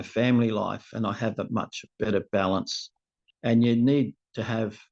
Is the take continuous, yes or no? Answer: yes